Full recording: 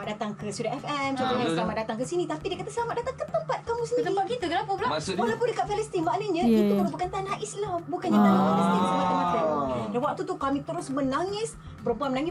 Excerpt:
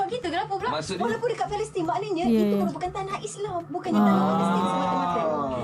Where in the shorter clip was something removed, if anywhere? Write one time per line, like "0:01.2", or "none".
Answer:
none